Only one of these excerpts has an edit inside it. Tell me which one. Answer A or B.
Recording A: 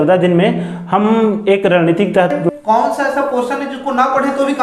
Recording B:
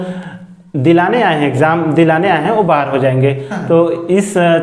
A